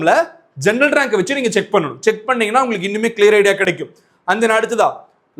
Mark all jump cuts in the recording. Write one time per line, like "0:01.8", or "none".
none